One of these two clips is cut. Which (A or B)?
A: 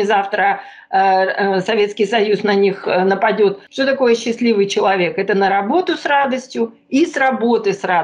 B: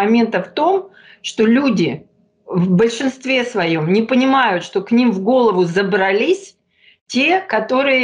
A